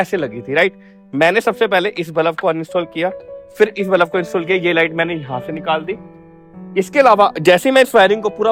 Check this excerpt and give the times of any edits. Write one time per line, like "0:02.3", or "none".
none